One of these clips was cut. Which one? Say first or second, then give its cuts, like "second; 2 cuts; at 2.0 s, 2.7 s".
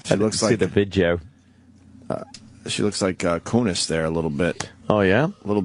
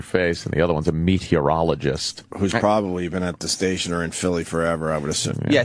second; 1 cut; at 1.7 s